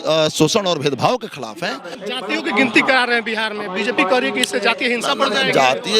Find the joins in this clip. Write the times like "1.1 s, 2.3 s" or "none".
1.9 s